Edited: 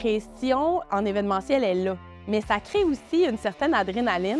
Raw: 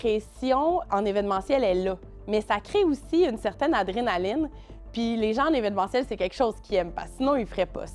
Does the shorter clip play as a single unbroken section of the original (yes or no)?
yes